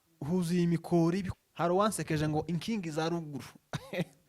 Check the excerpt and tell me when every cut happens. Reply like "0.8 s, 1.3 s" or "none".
1.3 s